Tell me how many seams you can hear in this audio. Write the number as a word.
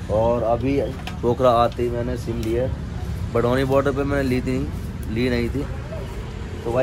zero